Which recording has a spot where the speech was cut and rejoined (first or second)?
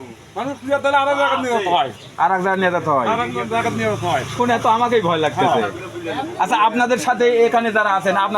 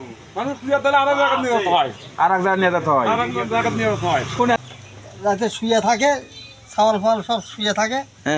second